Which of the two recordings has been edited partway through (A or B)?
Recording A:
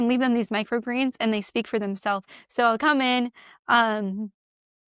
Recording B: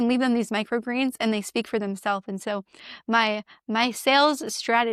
A